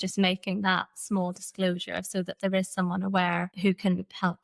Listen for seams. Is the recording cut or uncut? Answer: uncut